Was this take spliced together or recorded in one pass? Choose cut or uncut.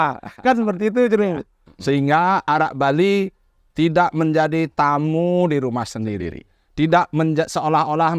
cut